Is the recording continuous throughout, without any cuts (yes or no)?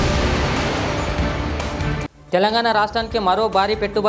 yes